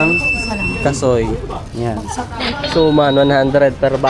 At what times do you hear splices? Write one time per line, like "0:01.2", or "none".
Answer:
0:02.5